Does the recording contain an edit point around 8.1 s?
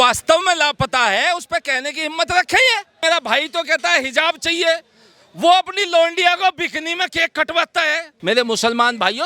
yes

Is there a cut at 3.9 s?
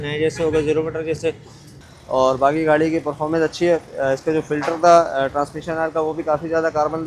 no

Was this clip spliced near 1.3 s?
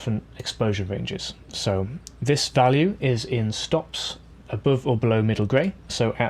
no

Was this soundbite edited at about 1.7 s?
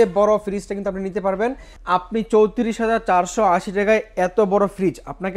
yes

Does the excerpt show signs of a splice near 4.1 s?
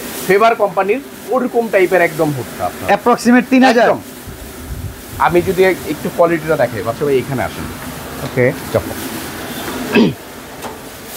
no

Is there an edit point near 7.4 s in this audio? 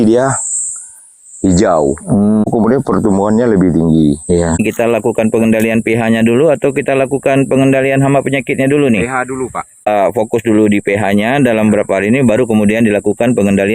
no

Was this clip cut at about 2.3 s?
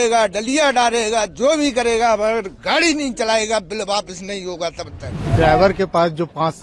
no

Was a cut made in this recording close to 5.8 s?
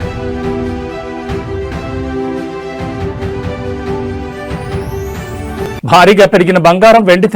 yes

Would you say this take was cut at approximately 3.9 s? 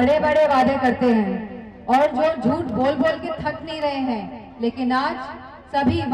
no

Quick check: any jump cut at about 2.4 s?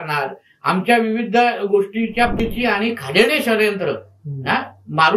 yes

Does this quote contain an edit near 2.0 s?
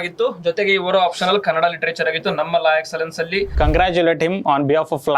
no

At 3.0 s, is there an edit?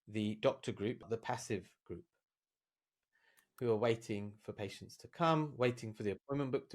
yes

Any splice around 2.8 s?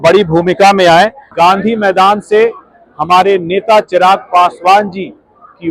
no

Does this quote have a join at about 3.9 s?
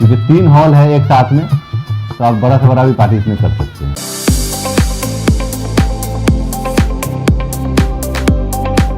yes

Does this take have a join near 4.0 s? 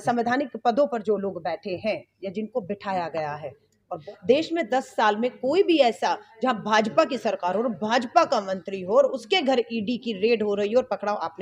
yes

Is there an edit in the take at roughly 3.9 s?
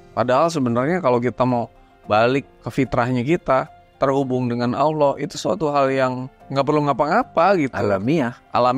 no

